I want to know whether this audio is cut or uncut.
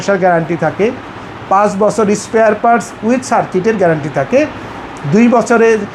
uncut